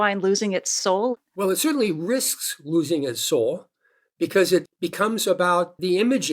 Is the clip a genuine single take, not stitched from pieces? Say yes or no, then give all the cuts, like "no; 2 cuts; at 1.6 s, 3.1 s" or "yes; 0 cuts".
no; 1 cut; at 1.1 s